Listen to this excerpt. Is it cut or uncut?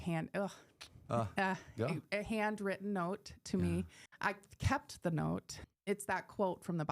cut